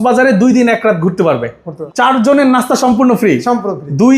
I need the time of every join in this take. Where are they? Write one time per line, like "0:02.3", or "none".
0:01.7